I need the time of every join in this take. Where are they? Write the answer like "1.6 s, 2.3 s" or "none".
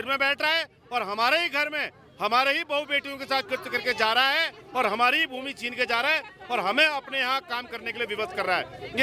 none